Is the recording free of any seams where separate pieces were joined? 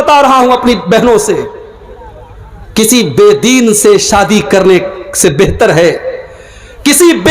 yes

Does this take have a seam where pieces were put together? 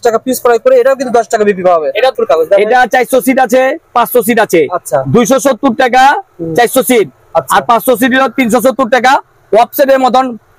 yes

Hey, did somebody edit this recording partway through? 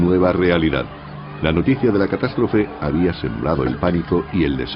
yes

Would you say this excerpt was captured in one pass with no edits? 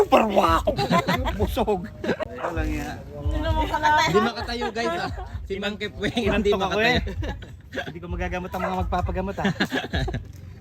no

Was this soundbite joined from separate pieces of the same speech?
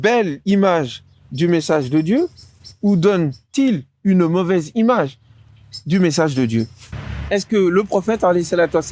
yes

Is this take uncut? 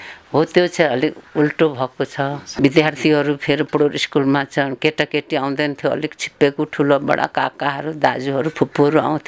no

